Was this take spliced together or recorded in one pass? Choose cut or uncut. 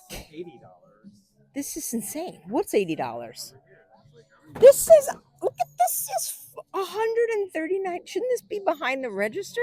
uncut